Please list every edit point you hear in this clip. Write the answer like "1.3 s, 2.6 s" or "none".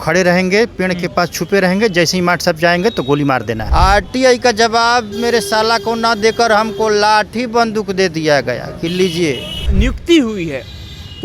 3.6 s, 9.7 s

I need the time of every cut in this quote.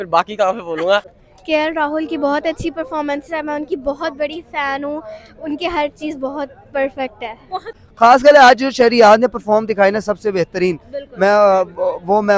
1.3 s, 7.8 s

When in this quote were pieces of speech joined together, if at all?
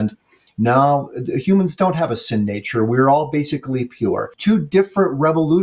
4.3 s

